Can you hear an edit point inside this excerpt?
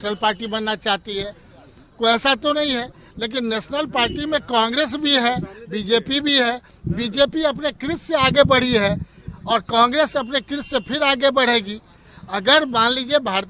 no; 0 cuts

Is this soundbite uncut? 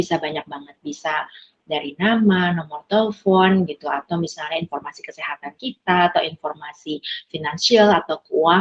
yes; 0 cuts

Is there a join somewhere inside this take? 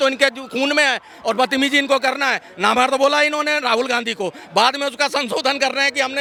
no; 0 cuts

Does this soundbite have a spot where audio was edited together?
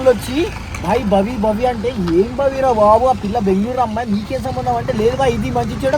no; 0 cuts

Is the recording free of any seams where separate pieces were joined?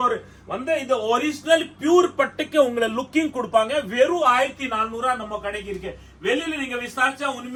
yes; 0 cuts

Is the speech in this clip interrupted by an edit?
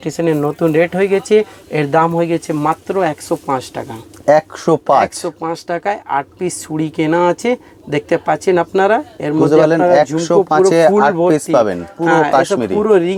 no; 0 cuts

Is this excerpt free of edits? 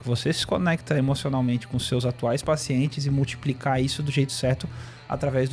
yes; 0 cuts

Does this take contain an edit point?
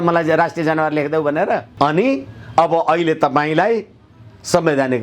yes; 1 cut; at 1.7 s

